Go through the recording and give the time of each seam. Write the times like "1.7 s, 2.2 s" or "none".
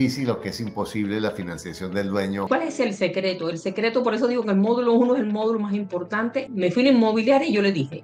2.5 s, 6.5 s